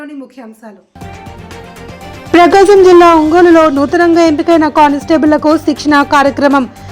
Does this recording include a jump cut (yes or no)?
yes